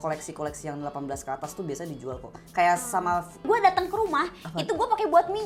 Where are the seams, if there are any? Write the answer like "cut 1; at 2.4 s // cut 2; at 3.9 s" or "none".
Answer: cut 1; at 3.4 s